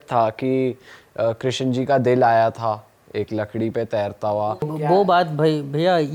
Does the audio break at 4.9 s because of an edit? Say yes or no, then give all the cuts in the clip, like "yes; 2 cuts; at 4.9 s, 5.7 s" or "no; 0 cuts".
yes; 1 cut; at 4.9 s